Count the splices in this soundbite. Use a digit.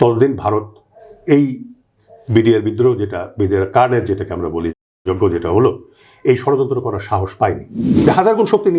1